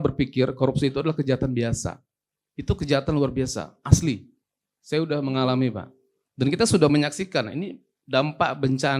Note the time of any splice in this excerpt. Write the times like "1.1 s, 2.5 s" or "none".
none